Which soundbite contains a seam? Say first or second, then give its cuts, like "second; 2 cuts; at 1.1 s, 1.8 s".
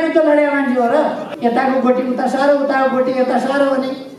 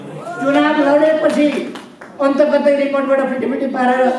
first; 1 cut; at 1.3 s